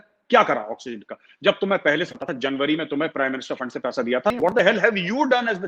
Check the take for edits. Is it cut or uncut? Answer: cut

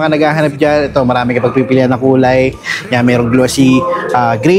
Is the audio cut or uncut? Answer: uncut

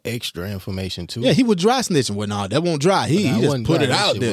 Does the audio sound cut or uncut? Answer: uncut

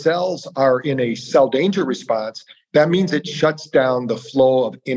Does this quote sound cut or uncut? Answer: cut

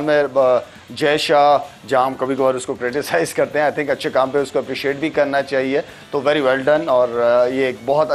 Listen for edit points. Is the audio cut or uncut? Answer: uncut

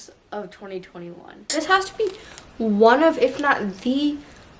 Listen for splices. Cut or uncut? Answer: cut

